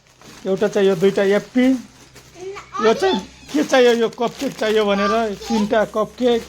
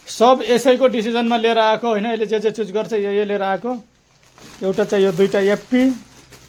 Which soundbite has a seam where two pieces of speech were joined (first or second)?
first